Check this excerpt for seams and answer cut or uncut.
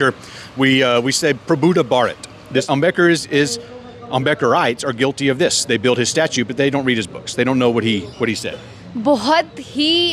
cut